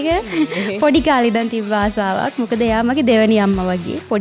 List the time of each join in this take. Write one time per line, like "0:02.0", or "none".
none